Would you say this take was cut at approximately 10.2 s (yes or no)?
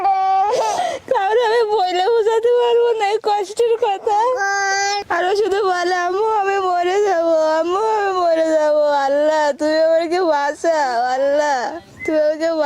no